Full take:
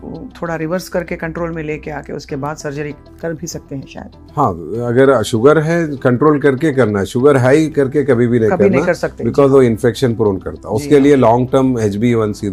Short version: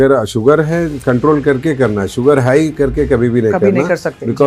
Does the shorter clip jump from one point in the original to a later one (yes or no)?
no